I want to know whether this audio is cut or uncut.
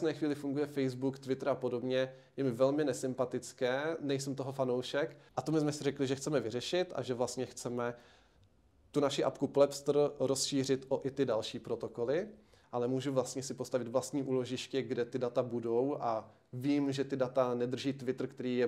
cut